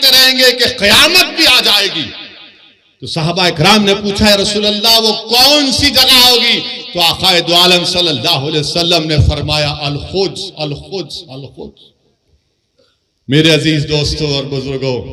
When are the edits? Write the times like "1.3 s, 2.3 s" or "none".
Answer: none